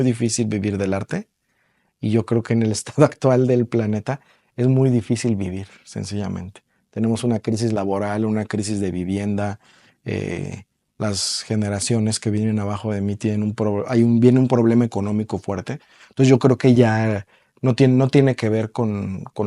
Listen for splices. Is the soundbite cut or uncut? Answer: uncut